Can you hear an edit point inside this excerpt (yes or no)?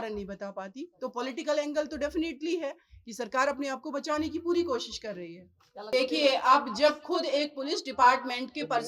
yes